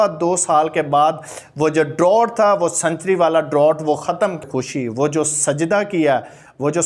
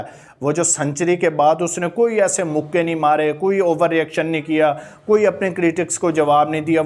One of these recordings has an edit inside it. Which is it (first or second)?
first